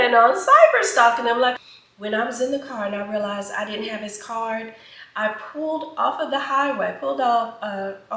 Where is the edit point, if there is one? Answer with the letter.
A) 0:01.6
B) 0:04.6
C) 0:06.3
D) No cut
A